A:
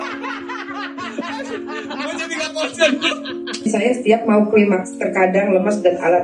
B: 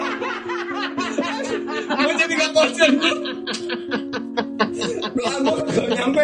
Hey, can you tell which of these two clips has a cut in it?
A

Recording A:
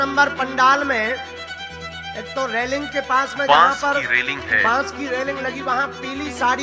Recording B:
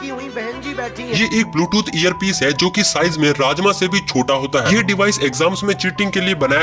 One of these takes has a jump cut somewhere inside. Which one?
B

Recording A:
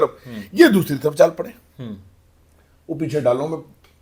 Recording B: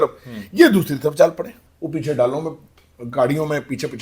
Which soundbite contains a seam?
B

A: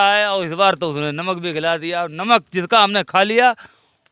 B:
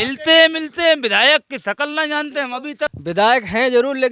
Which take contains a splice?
B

